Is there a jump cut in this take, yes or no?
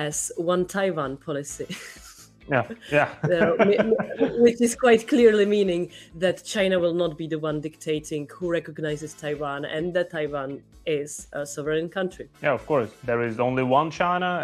no